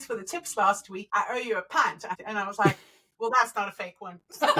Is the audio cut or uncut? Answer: cut